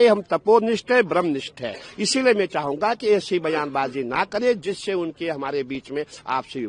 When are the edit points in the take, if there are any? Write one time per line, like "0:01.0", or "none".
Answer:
none